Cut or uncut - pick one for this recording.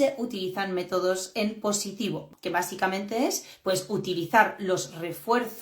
cut